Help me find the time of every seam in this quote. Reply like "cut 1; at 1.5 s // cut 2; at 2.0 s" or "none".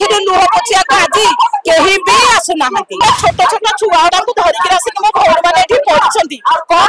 cut 1; at 3.0 s